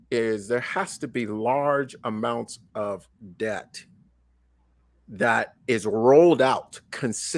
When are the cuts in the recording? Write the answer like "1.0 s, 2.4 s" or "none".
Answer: none